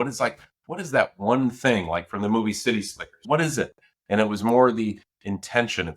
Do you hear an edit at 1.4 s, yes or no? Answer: no